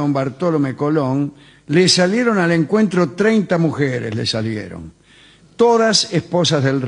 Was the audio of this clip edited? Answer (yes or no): no